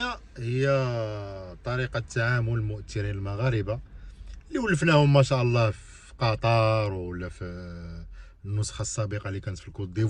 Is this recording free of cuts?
yes; 0 cuts

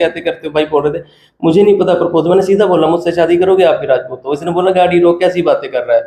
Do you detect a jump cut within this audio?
no; 0 cuts

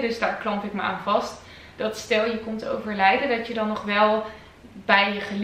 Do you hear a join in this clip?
no; 0 cuts

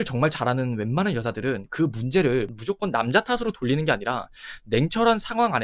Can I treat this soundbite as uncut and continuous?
yes; 0 cuts

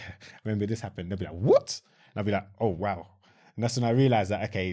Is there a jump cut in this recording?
no; 0 cuts

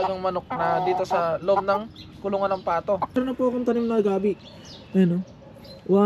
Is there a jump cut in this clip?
yes; 1 cut; at 3.2 s

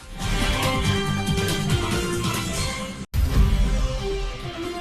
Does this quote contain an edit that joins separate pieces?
yes; 1 cut; at 3.1 s

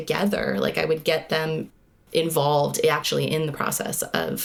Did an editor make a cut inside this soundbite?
no; 0 cuts

